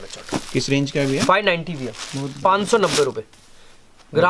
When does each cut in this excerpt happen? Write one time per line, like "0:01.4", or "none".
none